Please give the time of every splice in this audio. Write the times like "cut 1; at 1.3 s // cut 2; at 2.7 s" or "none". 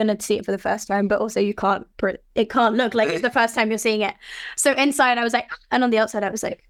none